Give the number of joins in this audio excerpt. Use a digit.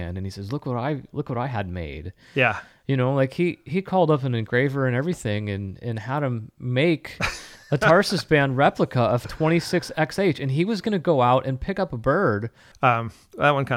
1